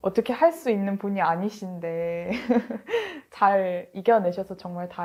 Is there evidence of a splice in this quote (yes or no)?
no